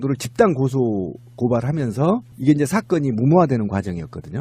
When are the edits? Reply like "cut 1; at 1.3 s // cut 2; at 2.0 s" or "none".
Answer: cut 1; at 2.8 s